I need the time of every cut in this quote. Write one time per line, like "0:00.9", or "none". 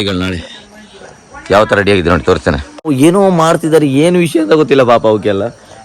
0:02.9